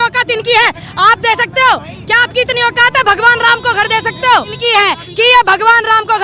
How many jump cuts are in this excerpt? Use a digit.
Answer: 1